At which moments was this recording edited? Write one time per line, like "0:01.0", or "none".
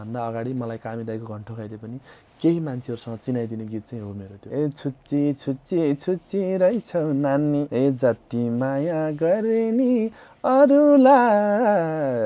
0:04.3
0:07.7